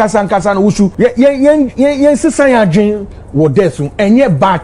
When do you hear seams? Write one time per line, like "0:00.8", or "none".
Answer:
0:00.9